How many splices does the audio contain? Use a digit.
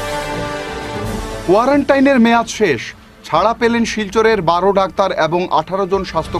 1